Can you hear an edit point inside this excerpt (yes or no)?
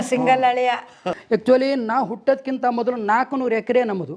yes